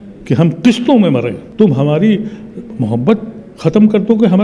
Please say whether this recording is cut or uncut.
cut